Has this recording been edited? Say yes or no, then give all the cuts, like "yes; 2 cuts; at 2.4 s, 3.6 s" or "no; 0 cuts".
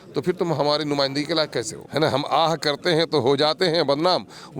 yes; 1 cut; at 1.8 s